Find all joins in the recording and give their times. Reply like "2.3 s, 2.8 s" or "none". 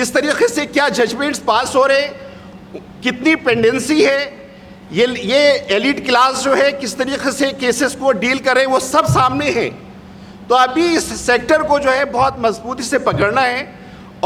none